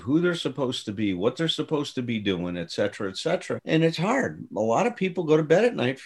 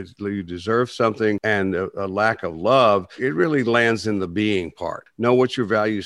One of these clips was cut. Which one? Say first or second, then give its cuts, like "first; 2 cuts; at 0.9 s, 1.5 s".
second; 3 cuts; at 1.4 s, 3.1 s, 5.1 s